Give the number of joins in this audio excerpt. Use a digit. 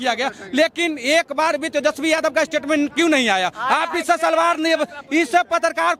0